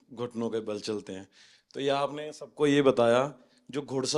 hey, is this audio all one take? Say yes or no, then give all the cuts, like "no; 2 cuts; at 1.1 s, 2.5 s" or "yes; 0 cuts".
yes; 0 cuts